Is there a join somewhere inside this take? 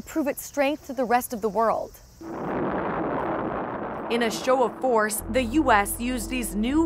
no; 0 cuts

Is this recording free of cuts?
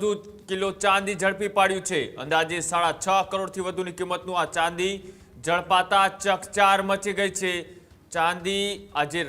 yes; 0 cuts

